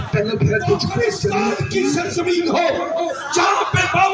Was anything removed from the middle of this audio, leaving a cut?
yes; 1 cut; at 1.6 s

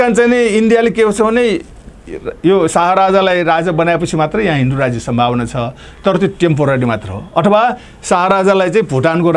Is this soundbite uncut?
yes; 0 cuts

